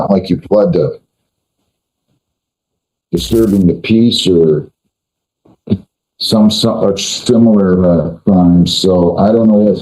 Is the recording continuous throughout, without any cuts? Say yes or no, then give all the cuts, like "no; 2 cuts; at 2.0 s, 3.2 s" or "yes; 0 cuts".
yes; 0 cuts